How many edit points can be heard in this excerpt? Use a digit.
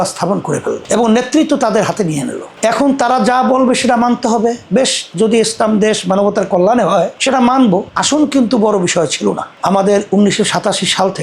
3